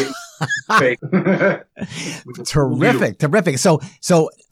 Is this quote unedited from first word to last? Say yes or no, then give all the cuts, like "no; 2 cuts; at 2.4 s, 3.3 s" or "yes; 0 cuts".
no; 1 cut; at 1.0 s